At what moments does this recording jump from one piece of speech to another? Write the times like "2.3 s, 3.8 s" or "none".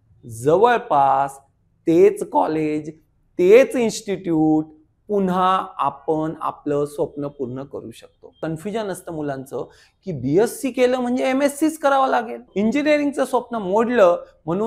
8.3 s, 12.5 s